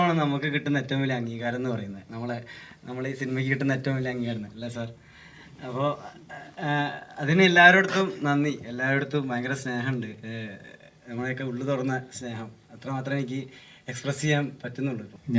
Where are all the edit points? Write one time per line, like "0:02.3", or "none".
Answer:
none